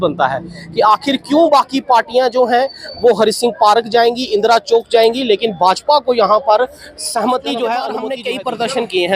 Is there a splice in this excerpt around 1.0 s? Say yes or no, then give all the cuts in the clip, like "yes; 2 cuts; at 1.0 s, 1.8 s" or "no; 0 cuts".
no; 1 cut; at 8.2 s